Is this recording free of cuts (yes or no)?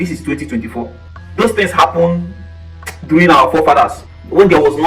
yes